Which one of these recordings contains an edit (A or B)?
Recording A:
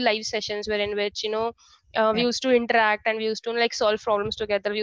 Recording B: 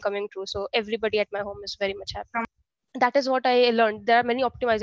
B